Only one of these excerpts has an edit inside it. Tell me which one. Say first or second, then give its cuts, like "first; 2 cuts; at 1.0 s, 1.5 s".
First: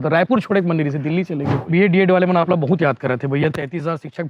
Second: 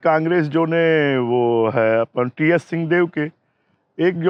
first; 1 cut; at 1.6 s